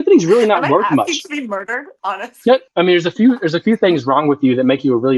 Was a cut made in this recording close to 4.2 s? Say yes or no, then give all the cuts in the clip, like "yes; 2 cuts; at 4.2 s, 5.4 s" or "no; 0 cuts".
no; 1 cut; at 2.7 s